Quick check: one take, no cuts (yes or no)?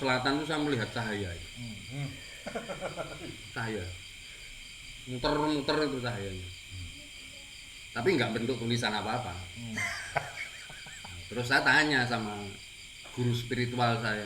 yes